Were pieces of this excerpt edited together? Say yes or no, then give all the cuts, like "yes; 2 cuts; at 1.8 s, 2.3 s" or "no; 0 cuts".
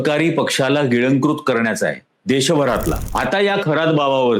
yes; 1 cut; at 3.0 s